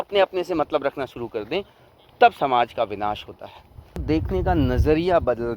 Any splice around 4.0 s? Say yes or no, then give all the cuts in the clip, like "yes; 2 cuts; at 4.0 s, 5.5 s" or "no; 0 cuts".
yes; 1 cut; at 4.0 s